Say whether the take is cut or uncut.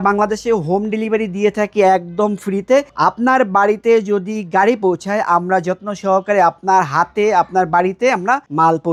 uncut